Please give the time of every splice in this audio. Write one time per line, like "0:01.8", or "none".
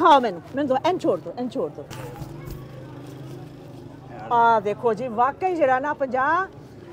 0:01.9